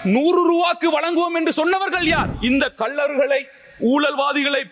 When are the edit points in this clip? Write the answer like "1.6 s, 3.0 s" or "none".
2.3 s